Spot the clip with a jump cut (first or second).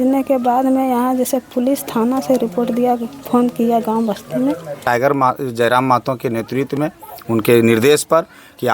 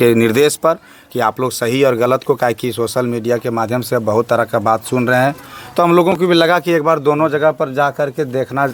first